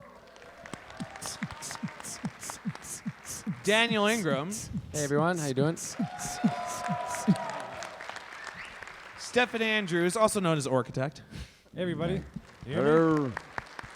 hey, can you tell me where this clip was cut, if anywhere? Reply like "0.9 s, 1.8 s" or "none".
4.2 s